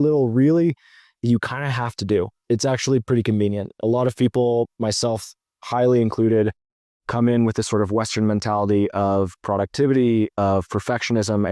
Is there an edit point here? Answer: yes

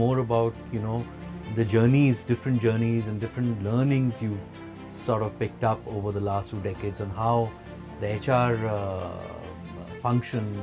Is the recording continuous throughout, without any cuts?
yes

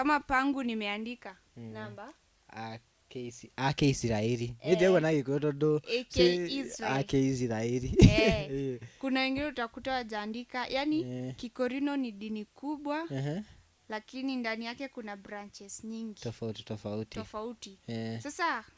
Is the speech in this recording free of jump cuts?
yes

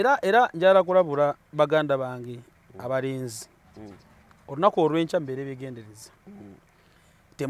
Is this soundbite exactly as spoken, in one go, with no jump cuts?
yes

